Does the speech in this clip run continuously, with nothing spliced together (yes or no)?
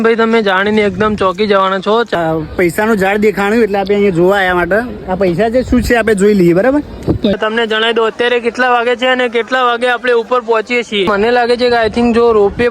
no